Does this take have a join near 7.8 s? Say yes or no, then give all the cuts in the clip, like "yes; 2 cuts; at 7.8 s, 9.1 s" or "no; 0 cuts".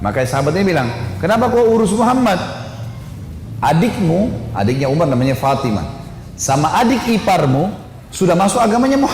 yes; 1 cut; at 7.8 s